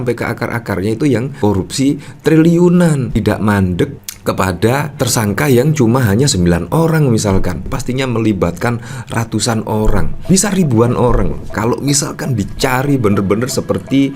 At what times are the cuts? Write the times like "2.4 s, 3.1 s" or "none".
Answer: 7.7 s, 10.2 s, 11.5 s